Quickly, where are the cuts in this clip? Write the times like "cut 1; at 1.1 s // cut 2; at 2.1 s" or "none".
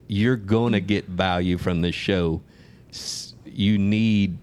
none